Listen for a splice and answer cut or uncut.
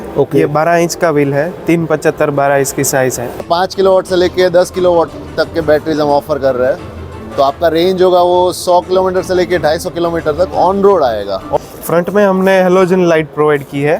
cut